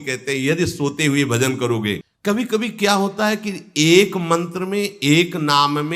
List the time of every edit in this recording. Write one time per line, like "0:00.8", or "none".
0:02.1